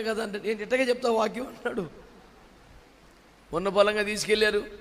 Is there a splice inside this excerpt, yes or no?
yes